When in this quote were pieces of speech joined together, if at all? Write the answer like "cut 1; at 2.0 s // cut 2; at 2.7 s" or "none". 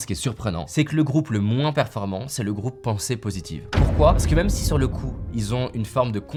none